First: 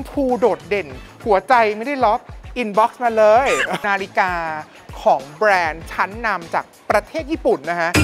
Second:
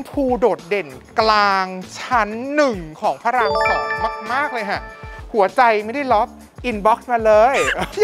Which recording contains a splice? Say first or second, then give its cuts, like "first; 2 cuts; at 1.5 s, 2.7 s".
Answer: first; 2 cuts; at 1.0 s, 3.8 s